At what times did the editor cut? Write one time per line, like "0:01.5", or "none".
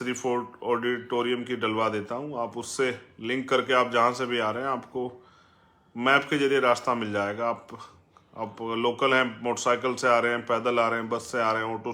none